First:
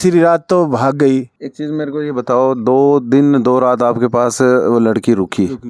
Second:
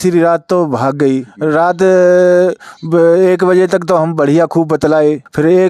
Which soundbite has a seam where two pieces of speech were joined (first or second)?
second